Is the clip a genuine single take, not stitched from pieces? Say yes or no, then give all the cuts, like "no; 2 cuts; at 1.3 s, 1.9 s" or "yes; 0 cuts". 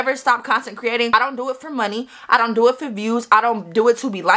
no; 1 cut; at 1.1 s